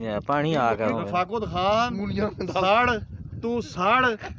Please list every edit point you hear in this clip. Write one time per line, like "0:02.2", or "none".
0:00.9